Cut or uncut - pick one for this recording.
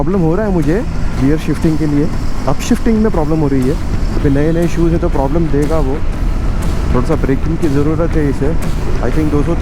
uncut